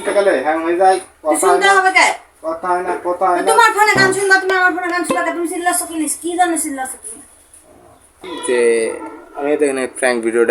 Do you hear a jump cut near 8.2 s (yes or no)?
yes